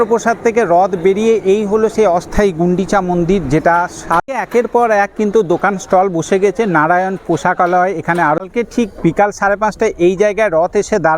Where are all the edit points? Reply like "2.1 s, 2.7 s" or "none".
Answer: 4.3 s, 8.4 s